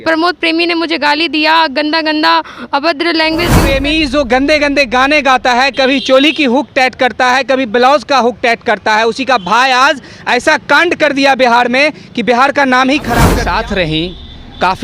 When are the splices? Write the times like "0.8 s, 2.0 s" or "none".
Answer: 3.6 s, 13.4 s